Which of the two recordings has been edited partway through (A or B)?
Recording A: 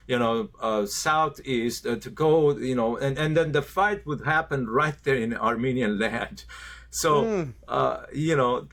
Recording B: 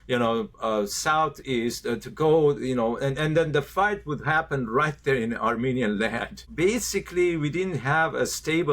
B